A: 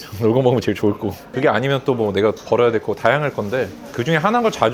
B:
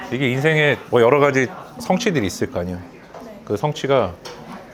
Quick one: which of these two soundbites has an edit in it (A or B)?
A